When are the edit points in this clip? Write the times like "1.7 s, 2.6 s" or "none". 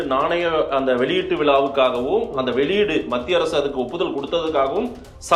none